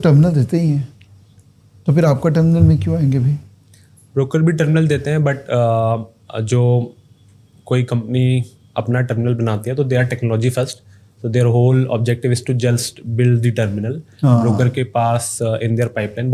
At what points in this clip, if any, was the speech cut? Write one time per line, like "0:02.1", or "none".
none